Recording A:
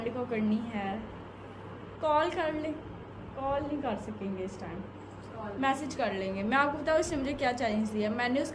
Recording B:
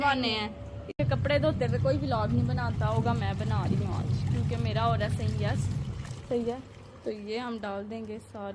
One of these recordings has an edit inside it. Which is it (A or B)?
B